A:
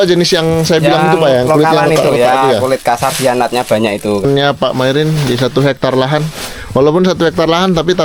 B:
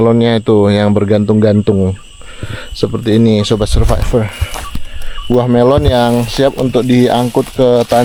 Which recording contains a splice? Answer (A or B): A